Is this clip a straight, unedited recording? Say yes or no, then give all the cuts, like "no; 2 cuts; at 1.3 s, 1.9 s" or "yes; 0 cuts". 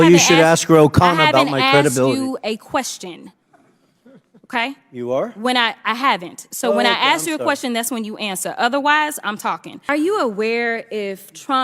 no; 1 cut; at 9.7 s